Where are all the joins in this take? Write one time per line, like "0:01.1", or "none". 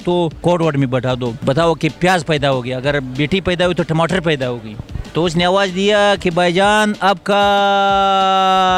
none